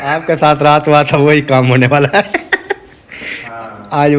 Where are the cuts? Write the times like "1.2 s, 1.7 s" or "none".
none